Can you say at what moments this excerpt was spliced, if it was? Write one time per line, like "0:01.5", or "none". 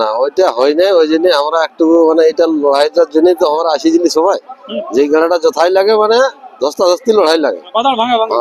none